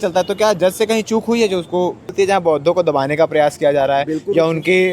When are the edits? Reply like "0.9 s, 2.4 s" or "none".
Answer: 2.1 s